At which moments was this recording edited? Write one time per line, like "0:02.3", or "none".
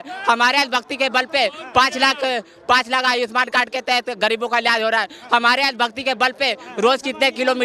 none

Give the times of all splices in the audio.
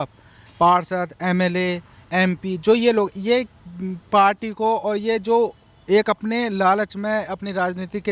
none

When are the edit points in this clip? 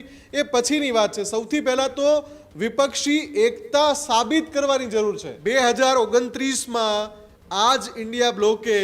0:05.3

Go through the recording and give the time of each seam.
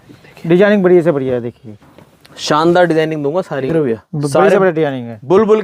0:03.7

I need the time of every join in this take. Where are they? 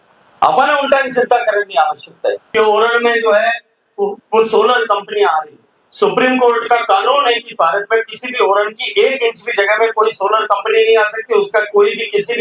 0:02.4

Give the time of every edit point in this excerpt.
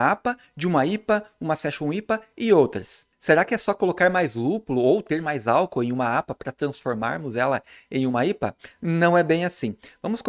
none

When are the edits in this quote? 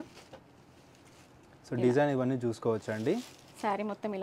none

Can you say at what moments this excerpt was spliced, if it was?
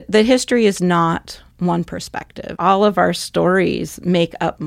0:02.6

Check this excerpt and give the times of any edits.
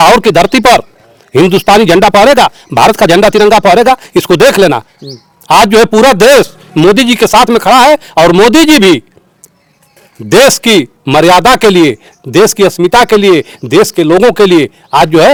none

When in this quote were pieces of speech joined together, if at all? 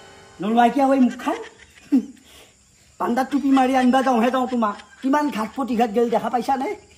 none

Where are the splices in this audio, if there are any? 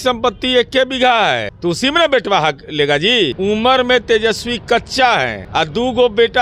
0:01.5
0:03.3
0:05.4

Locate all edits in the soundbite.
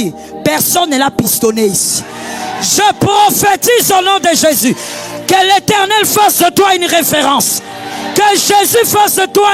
none

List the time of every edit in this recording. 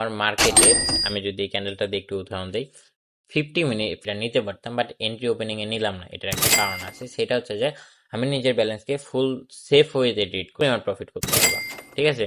0:04.1
0:10.5

